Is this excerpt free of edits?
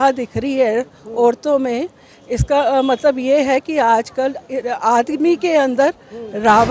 yes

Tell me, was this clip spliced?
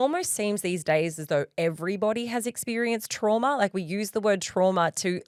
no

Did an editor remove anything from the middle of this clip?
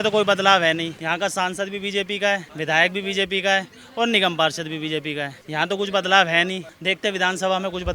yes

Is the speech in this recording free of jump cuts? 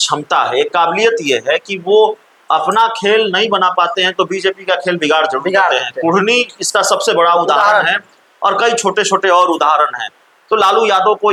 yes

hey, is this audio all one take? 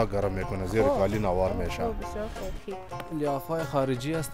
no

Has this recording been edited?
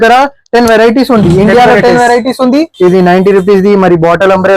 yes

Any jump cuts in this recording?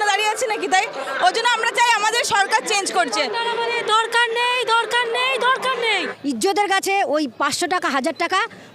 yes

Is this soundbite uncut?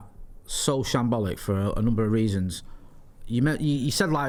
yes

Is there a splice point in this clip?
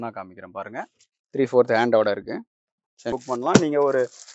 yes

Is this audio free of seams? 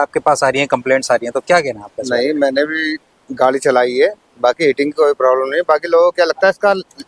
yes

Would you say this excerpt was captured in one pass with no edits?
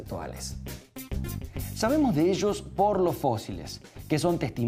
no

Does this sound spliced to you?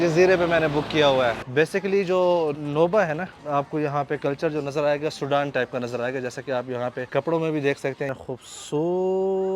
yes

